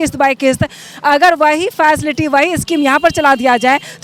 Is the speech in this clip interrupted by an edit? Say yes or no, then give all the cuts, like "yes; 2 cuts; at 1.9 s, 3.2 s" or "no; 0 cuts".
no; 0 cuts